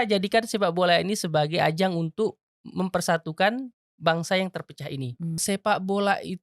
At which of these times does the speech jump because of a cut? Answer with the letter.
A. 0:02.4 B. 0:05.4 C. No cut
B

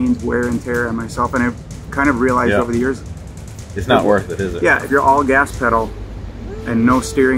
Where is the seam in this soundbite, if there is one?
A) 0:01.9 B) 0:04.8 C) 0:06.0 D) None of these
B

